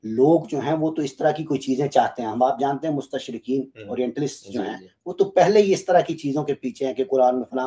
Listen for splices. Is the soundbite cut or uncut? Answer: uncut